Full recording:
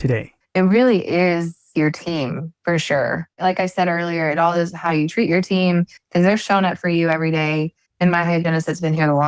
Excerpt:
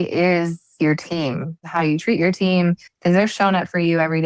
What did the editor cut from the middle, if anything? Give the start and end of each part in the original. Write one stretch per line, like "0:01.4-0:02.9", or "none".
0:02.6-0:04.7